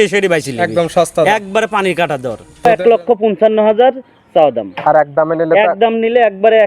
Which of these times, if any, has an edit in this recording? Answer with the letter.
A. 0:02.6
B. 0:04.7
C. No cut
A